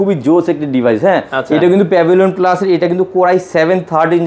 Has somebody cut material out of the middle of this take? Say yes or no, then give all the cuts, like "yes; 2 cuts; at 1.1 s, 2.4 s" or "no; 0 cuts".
no; 0 cuts